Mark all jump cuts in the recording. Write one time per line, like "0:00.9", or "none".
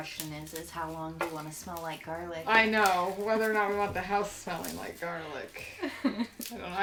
none